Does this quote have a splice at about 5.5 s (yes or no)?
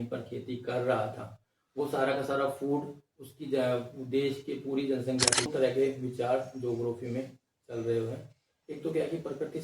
yes